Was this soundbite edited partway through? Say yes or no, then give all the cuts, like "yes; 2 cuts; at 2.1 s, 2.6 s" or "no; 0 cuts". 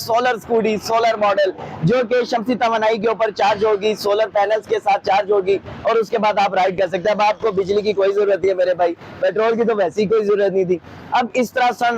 no; 0 cuts